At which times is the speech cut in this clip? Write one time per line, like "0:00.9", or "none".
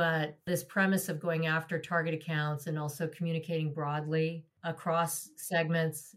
none